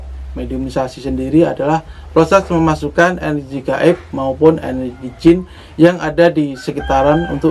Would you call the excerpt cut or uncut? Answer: uncut